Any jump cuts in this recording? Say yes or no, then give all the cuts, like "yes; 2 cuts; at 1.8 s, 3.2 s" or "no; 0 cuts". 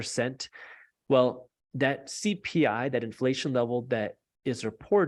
no; 0 cuts